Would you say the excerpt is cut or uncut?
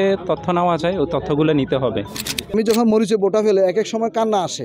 cut